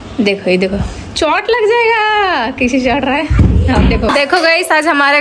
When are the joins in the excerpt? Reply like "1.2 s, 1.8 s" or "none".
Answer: 4.1 s